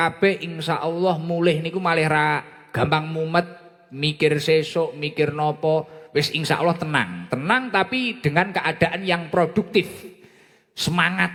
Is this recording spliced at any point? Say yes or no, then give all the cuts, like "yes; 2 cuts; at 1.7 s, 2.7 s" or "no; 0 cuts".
no; 0 cuts